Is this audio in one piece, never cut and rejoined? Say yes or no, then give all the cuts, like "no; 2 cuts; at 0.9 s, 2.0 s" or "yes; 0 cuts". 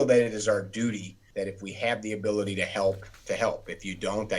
no; 2 cuts; at 1.1 s, 3.1 s